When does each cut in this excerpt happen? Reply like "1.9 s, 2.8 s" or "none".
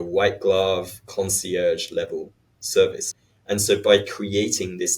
3.0 s